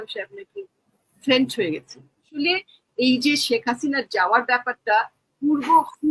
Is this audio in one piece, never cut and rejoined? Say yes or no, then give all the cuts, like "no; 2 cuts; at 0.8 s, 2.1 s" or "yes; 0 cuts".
no; 1 cut; at 2.4 s